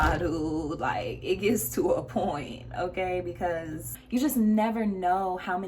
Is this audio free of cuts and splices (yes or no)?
no